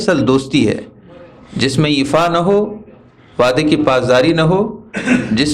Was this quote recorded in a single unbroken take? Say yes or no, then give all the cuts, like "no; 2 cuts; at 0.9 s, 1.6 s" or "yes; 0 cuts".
yes; 0 cuts